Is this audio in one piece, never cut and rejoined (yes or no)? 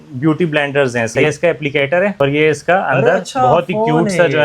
no